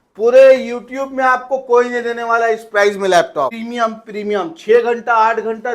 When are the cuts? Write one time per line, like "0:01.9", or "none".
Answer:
0:03.6